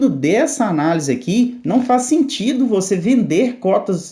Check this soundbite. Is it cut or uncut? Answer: uncut